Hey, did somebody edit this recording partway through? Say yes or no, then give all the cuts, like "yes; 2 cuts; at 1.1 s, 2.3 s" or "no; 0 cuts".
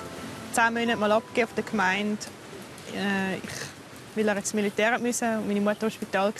no; 0 cuts